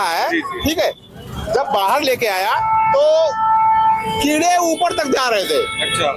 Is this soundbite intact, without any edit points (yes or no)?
yes